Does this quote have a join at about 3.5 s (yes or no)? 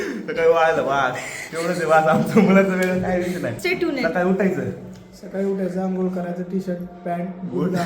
yes